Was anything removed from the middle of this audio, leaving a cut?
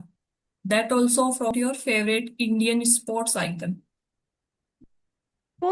yes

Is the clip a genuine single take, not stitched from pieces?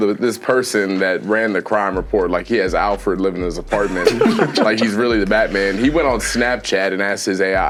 yes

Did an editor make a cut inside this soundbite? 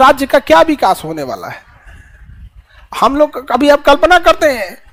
no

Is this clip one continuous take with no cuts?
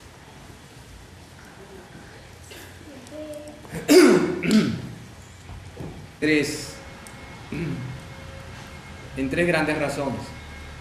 yes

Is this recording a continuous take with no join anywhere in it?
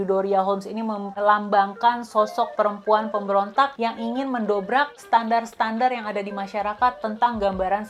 yes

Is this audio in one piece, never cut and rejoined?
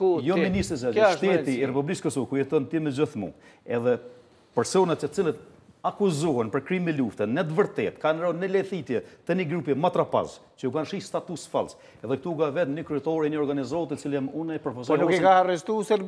yes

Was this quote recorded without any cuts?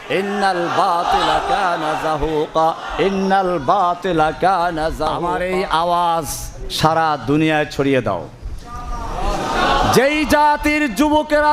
no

